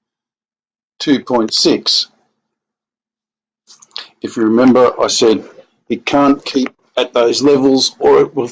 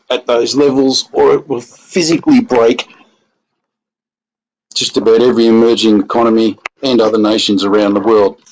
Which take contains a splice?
second; 1 cut; at 5.1 s

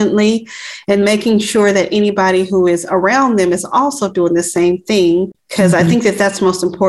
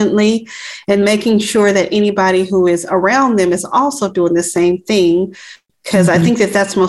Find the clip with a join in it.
first; 1 cut; at 5.4 s

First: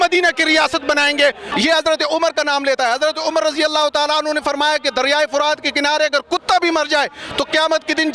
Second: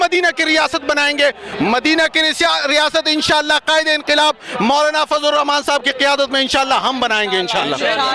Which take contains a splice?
first; 1 cut; at 1.5 s

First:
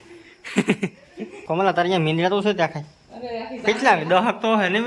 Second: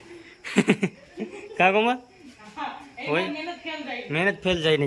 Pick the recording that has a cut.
first; 1 cut; at 1.4 s

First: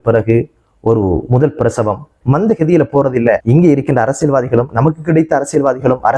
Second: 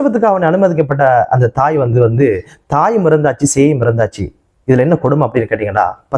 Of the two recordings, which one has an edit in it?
first; 2 cuts; at 2.1 s, 3.4 s

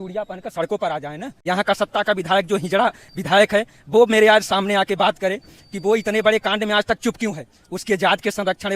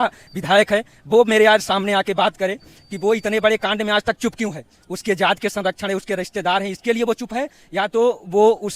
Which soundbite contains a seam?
first; 1 cut; at 1.3 s

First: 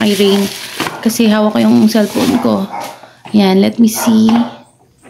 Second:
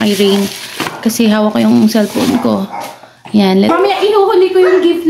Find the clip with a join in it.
second; 1 cut; at 3.7 s

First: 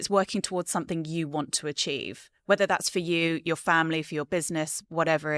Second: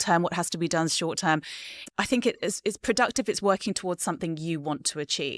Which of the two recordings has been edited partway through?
second; 1 cut; at 1.9 s

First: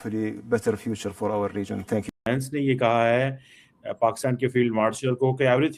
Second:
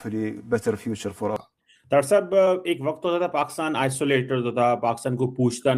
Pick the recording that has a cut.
second; 1 cut; at 1.3 s

